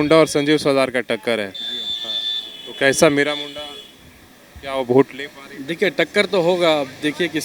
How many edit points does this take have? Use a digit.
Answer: 0